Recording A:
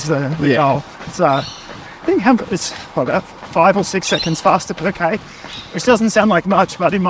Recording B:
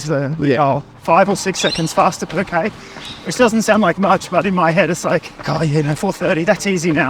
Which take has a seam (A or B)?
B